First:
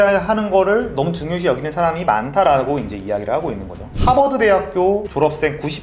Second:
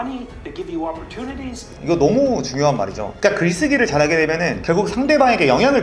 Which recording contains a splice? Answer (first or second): first